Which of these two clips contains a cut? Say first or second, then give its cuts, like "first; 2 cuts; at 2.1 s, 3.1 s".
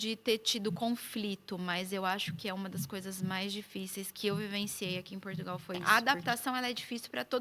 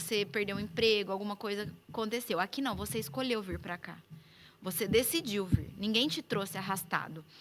first; 1 cut; at 6.1 s